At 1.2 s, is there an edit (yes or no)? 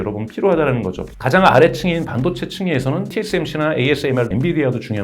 no